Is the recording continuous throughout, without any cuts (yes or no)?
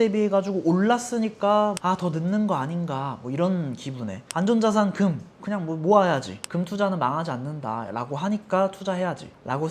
no